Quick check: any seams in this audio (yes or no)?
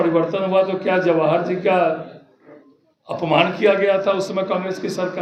no